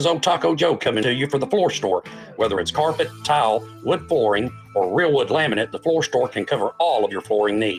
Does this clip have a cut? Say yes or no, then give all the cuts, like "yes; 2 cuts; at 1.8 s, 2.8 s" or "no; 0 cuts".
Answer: yes; 1 cut; at 1.0 s